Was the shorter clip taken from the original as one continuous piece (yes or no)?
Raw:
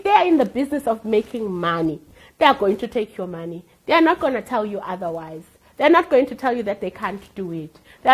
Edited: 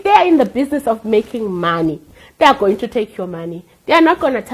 yes